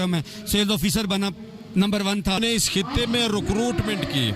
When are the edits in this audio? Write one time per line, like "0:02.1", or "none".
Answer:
0:02.4